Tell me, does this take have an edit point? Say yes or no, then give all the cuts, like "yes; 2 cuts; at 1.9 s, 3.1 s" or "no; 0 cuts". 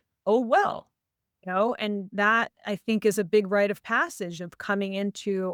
no; 0 cuts